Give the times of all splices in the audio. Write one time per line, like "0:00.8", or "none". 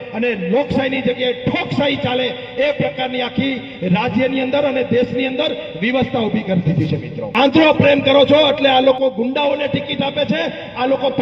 0:07.2